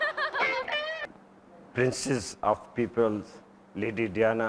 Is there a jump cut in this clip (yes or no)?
yes